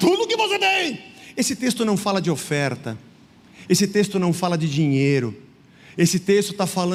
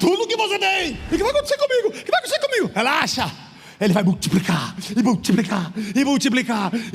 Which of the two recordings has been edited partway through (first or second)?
second